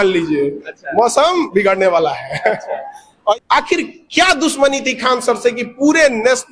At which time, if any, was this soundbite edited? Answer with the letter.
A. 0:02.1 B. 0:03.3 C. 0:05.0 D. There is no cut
B